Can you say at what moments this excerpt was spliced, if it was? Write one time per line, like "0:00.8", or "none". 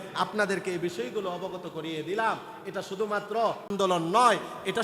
0:03.7